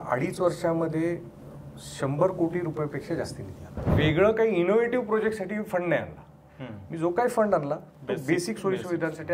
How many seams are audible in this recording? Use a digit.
1